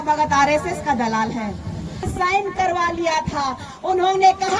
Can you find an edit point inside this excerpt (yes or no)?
yes